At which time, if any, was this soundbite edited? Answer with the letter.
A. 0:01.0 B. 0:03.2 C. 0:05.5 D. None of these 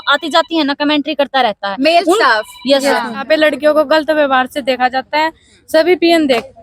B